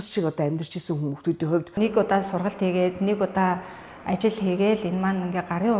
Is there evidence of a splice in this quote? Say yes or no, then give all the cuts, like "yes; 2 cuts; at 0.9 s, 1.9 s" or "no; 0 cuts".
yes; 1 cut; at 1.7 s